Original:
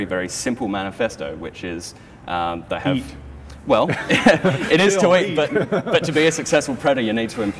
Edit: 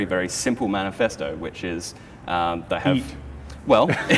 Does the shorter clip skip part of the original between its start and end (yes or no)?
no